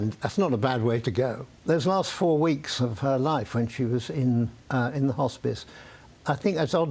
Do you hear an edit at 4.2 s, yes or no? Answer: no